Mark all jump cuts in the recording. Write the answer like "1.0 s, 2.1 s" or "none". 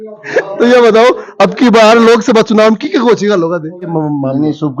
3.8 s

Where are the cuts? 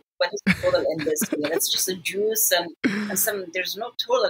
none

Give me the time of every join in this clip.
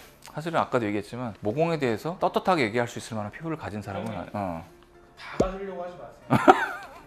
none

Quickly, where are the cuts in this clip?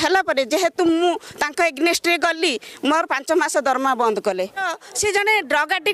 4.6 s

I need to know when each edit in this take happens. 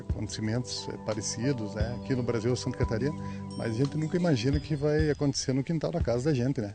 none

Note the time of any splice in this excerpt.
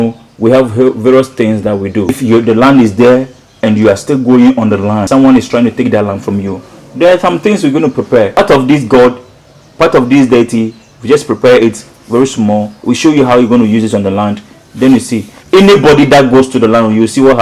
2.1 s, 5.1 s, 8.4 s

